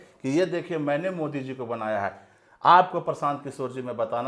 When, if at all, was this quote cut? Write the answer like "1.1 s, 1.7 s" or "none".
none

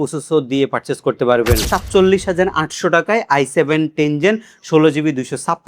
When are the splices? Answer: 1.6 s

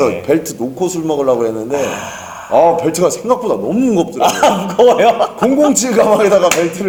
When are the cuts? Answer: none

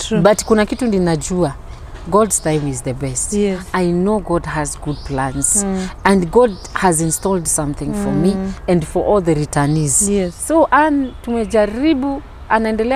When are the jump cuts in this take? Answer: 3.6 s, 10.4 s

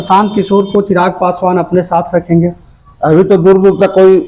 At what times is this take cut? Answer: none

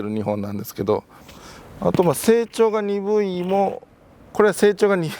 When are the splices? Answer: 1.3 s

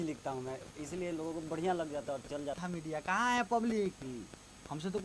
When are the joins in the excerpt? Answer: 2.6 s

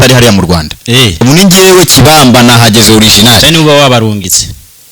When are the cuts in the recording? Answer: 1.2 s

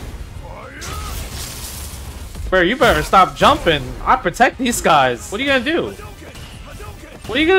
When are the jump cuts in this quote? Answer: 5.3 s

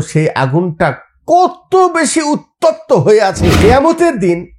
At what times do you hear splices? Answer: 3.6 s

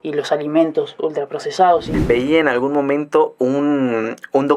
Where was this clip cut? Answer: 1.9 s

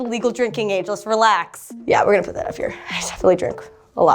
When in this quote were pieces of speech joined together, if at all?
1.7 s

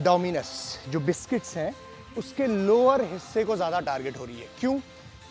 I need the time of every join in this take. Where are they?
none

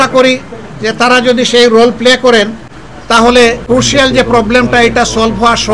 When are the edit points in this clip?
3.6 s

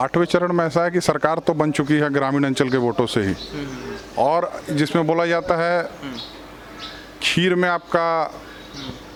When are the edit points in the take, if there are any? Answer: none

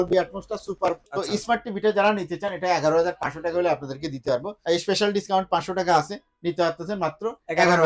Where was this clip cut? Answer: 1.0 s, 4.5 s

